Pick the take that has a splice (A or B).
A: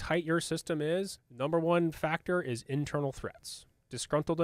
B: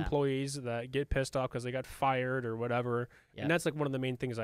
A